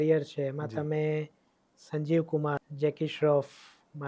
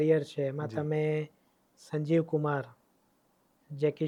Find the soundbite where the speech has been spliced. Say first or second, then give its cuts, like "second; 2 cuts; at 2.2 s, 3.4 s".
first; 1 cut; at 2.7 s